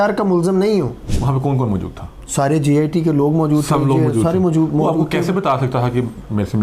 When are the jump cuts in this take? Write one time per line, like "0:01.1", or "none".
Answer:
0:01.1